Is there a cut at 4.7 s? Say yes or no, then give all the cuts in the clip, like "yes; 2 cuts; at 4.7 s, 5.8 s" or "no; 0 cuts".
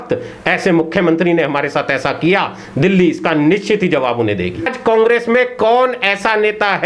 yes; 1 cut; at 4.7 s